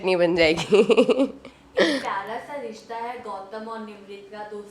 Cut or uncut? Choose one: uncut